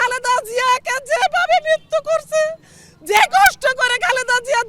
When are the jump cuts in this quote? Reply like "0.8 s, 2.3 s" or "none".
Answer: none